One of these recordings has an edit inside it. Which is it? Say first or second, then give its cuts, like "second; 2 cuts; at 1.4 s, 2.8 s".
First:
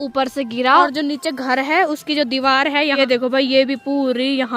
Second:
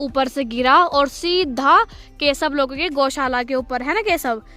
first; 2 cuts; at 0.9 s, 3.0 s